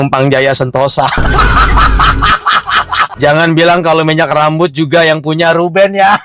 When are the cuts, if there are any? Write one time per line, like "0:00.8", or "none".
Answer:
0:03.1